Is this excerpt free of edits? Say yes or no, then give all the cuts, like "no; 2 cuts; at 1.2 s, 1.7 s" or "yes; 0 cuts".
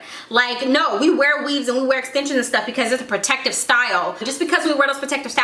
no; 1 cut; at 4.2 s